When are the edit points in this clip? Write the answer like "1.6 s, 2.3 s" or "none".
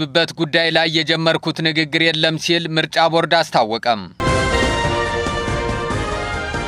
4.1 s